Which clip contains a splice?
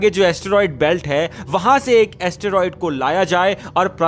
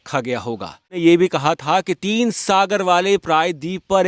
second; 1 cut; at 1.0 s

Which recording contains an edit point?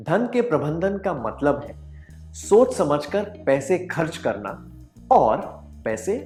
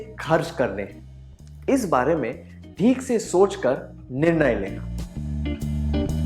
second; 1 cut; at 4.9 s

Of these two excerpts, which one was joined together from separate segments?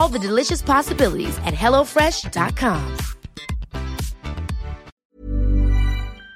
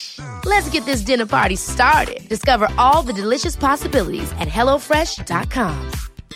first; 1 cut; at 4.9 s

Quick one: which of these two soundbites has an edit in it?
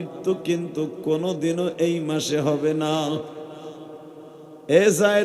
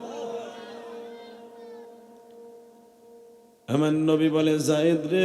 second; 1 cut; at 3.4 s

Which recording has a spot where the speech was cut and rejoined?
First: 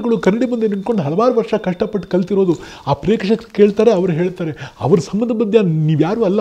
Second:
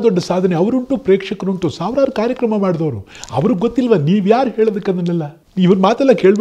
second; 1 cut; at 5.4 s

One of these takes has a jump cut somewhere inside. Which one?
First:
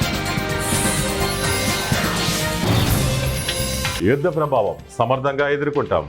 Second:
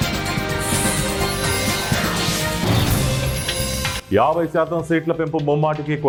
first; 1 cut; at 3.9 s

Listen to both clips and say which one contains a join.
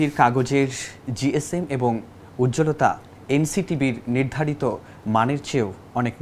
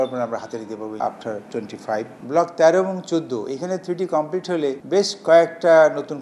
second; 2 cuts; at 1.0 s, 4.8 s

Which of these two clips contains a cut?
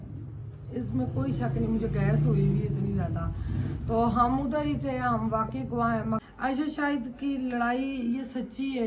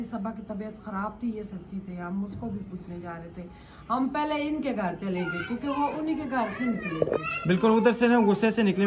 first; 1 cut; at 6.2 s

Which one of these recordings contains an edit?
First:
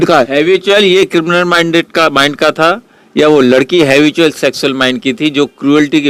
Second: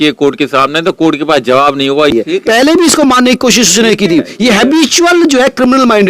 second; 1 cut; at 2.1 s

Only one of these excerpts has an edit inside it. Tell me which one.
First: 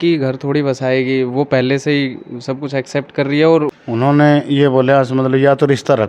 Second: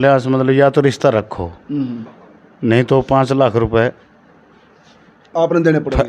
first; 1 cut; at 3.7 s

